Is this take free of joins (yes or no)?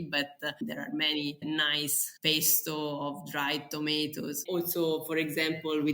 no